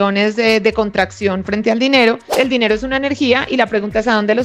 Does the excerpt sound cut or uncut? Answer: cut